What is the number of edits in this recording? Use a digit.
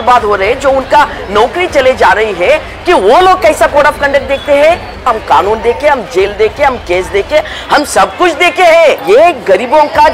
2